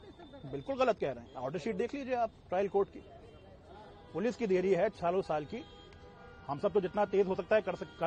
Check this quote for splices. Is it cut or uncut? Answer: uncut